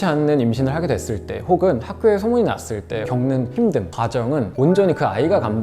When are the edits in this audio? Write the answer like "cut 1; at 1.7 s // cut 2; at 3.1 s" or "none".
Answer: cut 1; at 3.0 s // cut 2; at 4.5 s

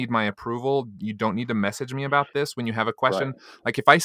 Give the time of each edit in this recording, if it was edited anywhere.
none

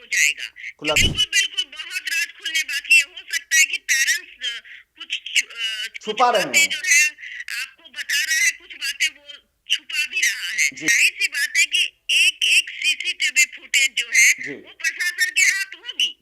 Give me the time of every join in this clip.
cut 1; at 1.0 s // cut 2; at 10.9 s

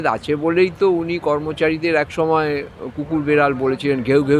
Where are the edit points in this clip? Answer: none

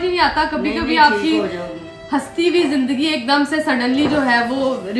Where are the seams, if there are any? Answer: none

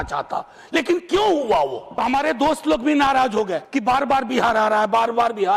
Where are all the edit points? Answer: cut 1; at 1.8 s // cut 2; at 3.6 s

